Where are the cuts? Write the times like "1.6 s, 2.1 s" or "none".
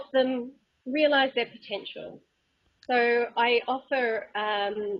3.8 s